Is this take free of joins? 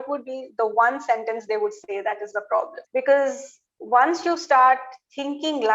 no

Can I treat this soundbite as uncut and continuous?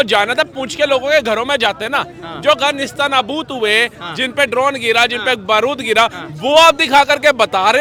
yes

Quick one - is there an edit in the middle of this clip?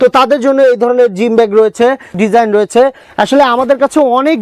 yes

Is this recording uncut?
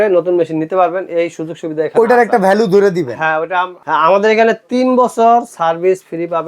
no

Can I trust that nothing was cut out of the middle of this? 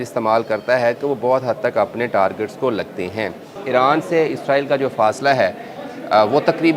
no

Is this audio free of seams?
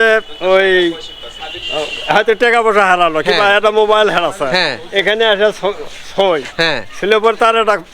yes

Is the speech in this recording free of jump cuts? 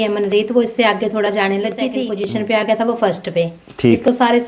no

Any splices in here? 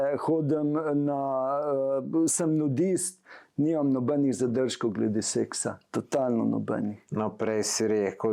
no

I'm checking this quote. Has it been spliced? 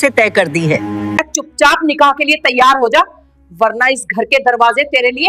yes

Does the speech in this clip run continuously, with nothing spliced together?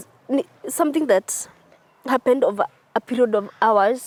yes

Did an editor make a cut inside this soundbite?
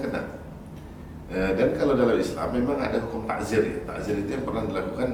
no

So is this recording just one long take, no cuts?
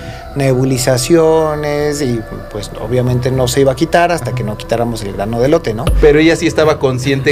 yes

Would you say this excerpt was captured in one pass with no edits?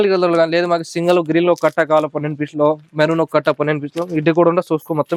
yes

